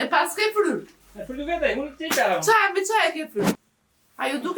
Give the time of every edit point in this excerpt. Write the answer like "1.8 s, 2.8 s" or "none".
3.5 s